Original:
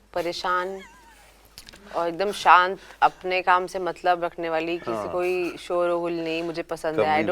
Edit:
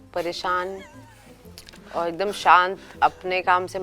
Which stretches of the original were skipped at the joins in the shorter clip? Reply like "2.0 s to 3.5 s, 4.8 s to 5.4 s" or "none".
none

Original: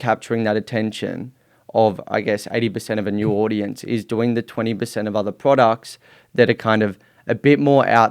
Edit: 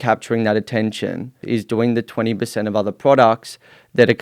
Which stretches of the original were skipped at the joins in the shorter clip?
1.4 s to 3.8 s

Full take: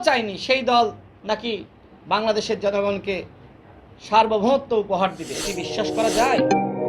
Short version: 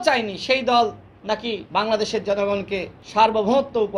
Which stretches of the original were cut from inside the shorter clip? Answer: 1.6 s to 1.9 s, 3.3 s to 3.9 s

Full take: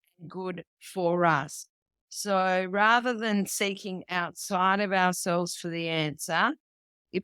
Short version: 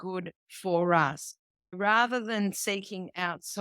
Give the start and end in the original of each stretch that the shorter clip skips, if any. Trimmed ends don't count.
2.1 s to 2.7 s

